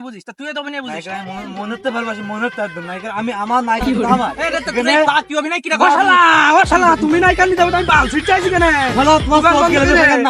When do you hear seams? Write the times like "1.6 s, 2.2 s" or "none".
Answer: none